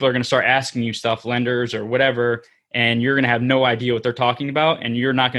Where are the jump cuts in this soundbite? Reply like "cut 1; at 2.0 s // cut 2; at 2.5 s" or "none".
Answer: none